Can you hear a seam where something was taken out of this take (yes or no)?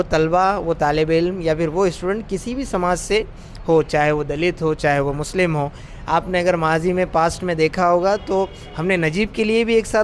no